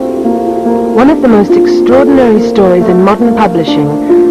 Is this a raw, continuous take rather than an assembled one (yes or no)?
yes